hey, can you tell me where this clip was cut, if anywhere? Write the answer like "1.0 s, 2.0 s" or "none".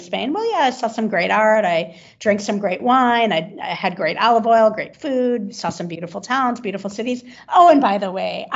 none